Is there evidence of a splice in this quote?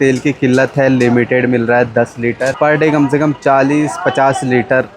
yes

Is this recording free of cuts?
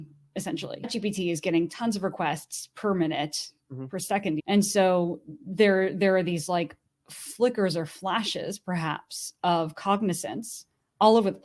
no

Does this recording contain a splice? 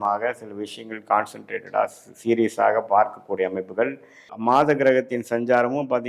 yes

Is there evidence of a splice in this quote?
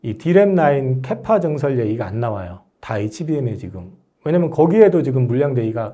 no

